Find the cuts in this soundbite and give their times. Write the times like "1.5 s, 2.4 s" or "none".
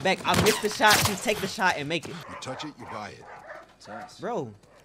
2.2 s